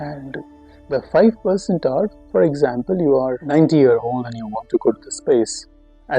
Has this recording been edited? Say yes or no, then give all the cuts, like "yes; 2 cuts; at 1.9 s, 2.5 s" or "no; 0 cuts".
yes; 1 cut; at 3.4 s